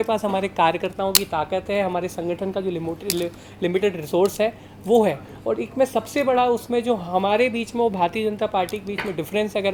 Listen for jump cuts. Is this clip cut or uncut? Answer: uncut